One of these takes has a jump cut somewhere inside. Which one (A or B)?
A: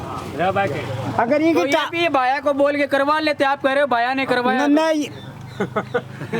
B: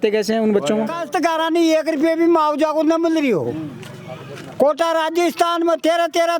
B